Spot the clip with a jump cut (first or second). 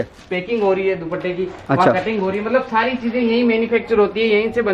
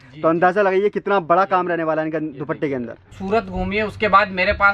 second